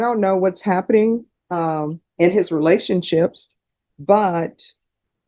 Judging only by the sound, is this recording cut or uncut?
cut